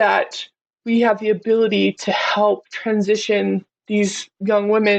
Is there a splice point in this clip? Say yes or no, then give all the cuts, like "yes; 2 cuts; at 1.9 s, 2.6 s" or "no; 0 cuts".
no; 0 cuts